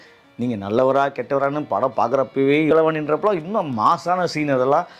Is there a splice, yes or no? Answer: yes